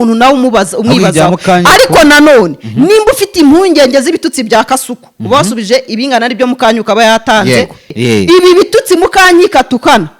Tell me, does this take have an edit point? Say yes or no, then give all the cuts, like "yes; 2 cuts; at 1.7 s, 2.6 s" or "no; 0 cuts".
yes; 1 cut; at 7.9 s